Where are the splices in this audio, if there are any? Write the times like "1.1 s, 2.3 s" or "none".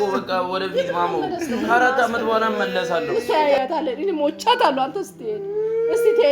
3.1 s

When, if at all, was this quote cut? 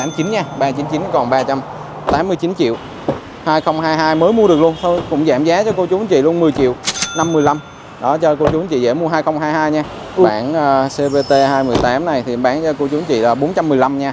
3.2 s, 10.3 s

